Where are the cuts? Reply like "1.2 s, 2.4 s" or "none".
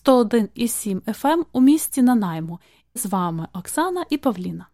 3.0 s

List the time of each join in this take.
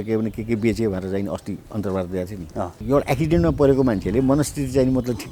2.8 s

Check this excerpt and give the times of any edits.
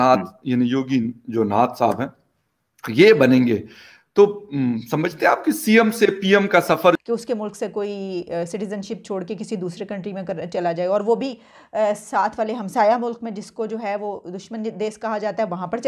7.0 s

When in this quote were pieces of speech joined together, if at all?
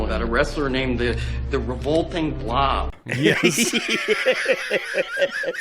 none

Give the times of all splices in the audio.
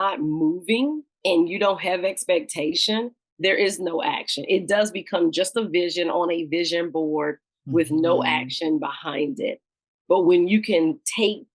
1.1 s

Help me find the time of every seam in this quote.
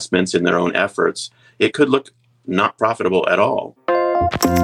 3.7 s

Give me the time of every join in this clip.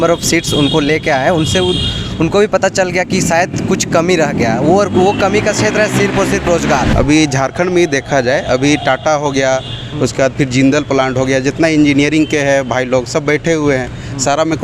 6.9 s

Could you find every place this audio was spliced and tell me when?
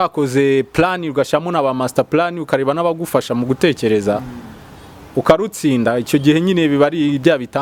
none

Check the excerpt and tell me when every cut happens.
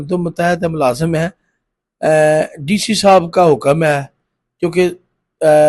none

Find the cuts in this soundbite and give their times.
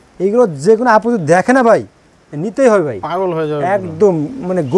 none

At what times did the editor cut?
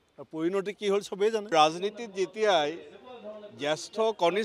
1.5 s

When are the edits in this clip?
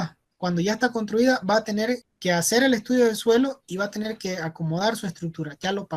2.1 s

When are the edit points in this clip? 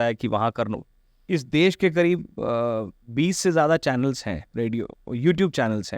1.2 s

